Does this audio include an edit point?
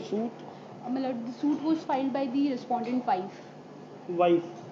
no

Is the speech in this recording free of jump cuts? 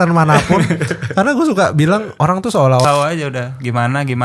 no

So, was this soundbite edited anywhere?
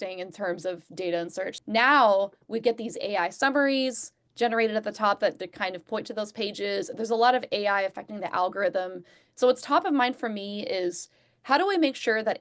yes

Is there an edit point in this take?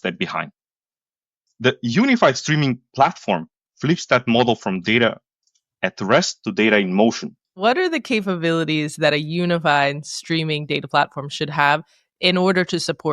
yes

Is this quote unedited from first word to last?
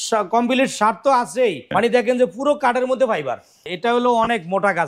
no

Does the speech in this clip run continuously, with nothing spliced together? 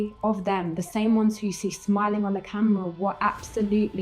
yes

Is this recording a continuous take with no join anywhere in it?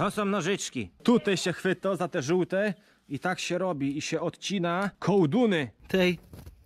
no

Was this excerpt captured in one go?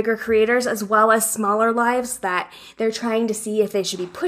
yes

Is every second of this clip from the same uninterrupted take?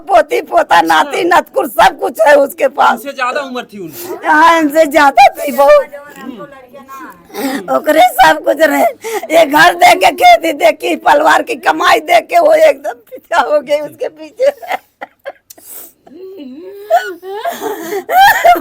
yes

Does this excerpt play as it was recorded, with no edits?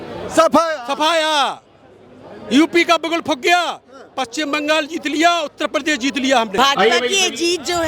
no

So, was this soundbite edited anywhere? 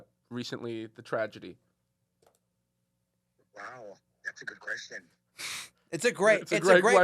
no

